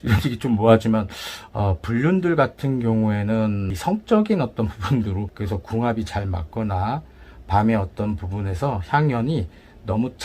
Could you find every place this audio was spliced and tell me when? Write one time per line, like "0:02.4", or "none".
0:03.7
0:05.3

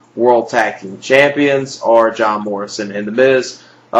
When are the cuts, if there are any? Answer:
0:02.6

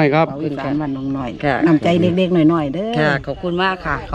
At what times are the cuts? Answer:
none

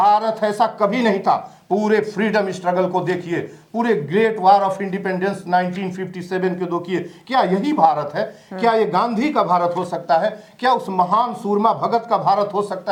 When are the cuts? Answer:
none

